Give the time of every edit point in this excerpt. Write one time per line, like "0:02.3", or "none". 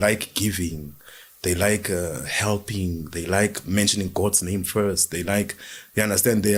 none